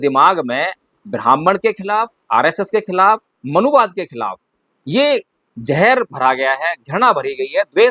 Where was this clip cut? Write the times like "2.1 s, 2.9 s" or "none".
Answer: 3.3 s